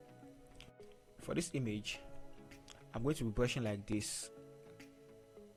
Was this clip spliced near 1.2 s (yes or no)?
no